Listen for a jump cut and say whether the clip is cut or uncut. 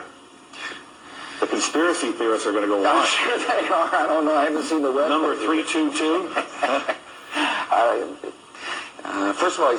uncut